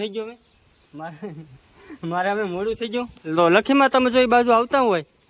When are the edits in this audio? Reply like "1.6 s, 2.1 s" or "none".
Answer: none